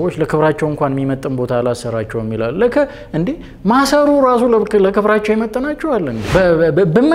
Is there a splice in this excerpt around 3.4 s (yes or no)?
no